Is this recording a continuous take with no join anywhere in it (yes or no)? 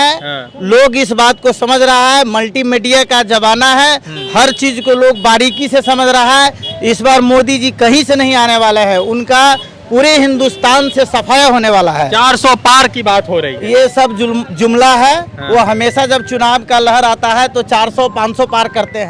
yes